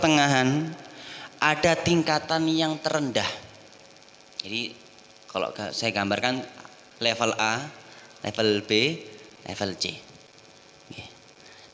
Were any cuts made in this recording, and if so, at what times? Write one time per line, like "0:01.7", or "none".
none